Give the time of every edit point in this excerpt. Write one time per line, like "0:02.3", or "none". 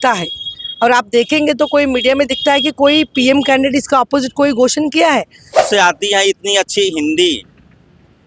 0:05.6